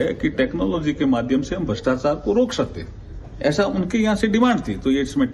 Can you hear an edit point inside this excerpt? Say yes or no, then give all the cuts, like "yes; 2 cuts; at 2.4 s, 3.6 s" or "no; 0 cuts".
yes; 1 cut; at 1.6 s